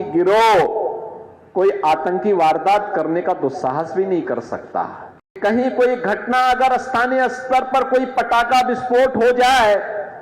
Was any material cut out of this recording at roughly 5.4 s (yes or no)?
yes